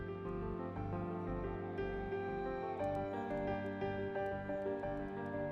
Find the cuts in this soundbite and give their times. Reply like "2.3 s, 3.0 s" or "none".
none